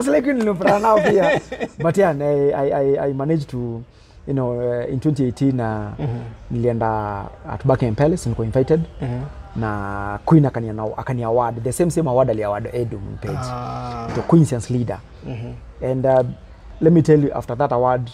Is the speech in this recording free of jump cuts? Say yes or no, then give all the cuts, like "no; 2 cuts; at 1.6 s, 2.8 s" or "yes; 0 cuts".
yes; 0 cuts